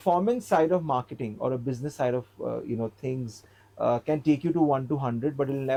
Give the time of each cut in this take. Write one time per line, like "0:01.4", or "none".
none